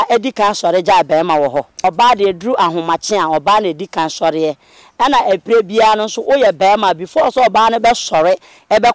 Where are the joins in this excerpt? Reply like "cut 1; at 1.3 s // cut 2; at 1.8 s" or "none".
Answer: cut 1; at 1.7 s